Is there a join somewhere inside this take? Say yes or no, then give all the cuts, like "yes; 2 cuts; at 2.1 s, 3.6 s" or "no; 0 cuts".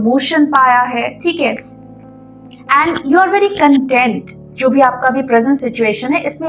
no; 0 cuts